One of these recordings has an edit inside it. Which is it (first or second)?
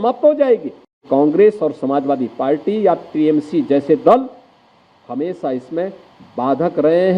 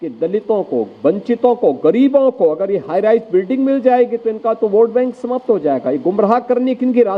first